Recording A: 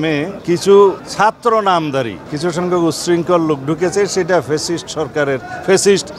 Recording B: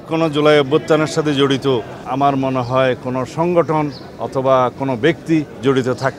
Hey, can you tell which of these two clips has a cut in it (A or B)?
A